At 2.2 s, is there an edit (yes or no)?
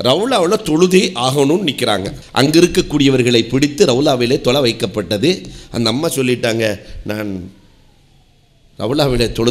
yes